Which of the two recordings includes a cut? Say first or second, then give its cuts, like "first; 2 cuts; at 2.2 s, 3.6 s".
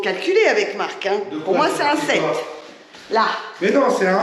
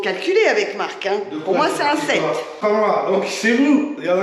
second; 1 cut; at 2.6 s